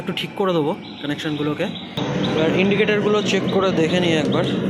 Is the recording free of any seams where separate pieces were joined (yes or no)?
yes